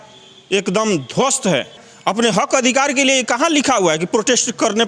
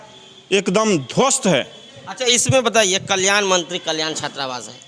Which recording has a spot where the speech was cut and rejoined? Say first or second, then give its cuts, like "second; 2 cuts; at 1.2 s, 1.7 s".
first; 1 cut; at 1.9 s